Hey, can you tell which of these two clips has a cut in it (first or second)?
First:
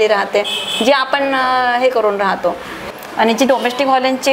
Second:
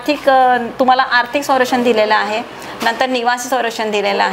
first